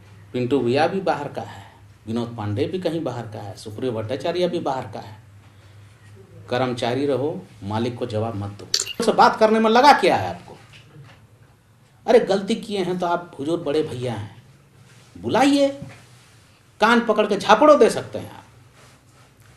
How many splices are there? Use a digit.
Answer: 1